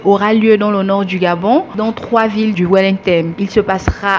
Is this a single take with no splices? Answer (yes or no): no